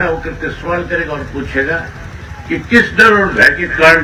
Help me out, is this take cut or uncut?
uncut